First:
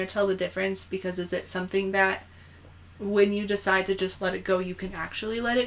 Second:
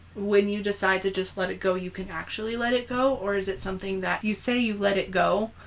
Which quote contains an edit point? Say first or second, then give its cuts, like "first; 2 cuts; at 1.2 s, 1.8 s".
second; 1 cut; at 4.2 s